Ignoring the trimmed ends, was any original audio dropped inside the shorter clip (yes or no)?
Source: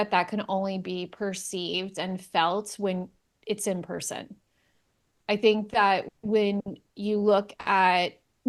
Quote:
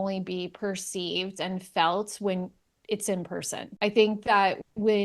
yes